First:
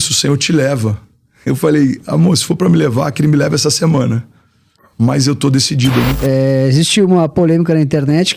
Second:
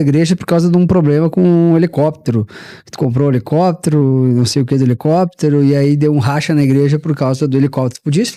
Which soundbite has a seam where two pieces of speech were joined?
first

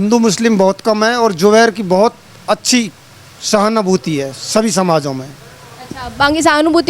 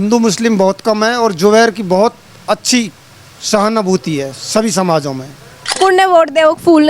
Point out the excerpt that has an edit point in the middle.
second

